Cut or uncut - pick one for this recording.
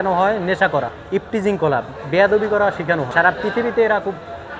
cut